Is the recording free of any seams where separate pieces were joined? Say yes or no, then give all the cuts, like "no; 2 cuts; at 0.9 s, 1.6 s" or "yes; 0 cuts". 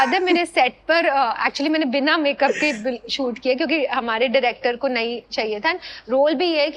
yes; 0 cuts